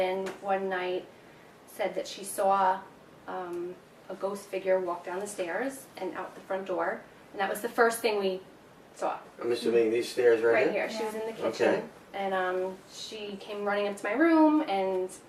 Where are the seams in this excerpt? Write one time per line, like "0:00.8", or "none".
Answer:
0:07.0